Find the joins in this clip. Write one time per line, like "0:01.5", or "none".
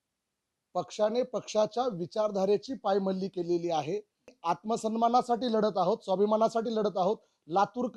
0:04.3